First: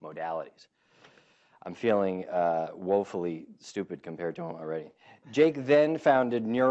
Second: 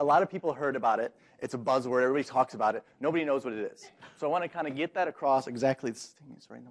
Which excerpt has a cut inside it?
second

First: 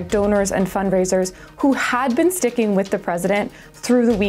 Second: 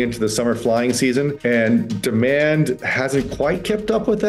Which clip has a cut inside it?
second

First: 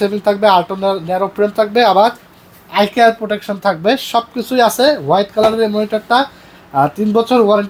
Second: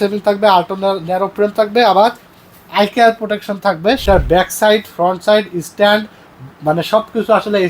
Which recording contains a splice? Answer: second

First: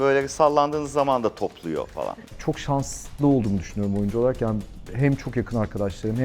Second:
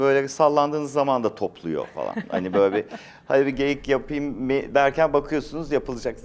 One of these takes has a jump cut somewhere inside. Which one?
first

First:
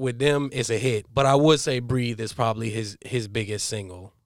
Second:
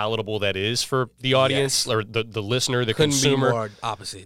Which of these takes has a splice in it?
first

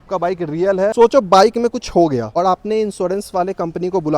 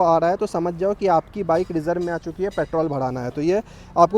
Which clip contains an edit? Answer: first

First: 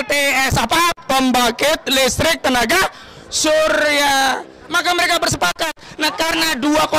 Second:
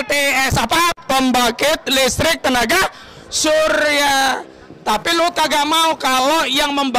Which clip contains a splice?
first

